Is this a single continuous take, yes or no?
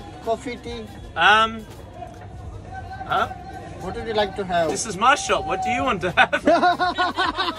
yes